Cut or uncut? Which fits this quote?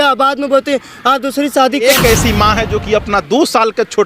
cut